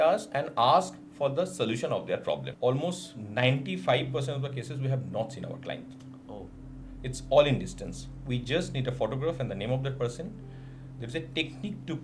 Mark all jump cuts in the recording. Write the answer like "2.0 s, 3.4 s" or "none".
2.5 s